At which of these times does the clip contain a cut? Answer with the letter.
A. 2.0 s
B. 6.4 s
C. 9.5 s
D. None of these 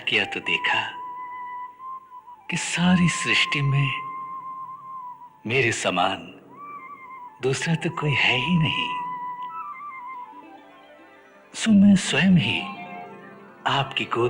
C